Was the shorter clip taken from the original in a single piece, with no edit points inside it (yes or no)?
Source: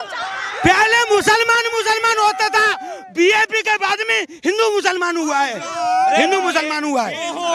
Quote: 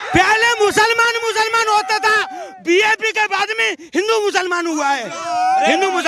yes